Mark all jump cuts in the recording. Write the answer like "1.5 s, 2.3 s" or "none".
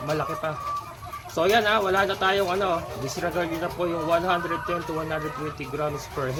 none